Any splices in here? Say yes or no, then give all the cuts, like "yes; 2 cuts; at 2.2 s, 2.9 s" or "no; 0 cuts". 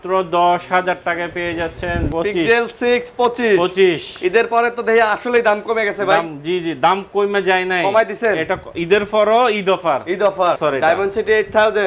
yes; 2 cuts; at 2.1 s, 10.6 s